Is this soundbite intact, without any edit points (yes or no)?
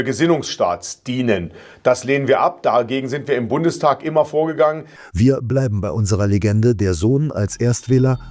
no